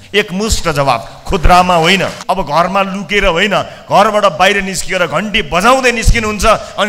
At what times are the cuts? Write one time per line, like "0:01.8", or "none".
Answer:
0:02.2